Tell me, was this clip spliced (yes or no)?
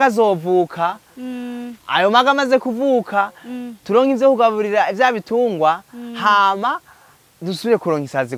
no